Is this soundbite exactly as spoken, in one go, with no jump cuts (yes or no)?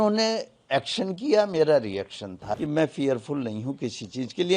no